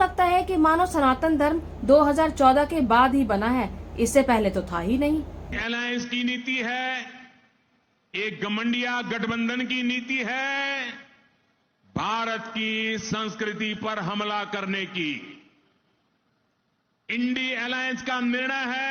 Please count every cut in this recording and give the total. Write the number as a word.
zero